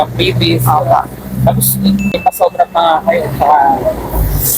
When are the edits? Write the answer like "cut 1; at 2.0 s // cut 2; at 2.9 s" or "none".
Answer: cut 1; at 2.1 s